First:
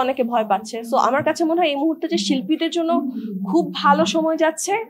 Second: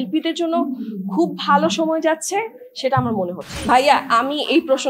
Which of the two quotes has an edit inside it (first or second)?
second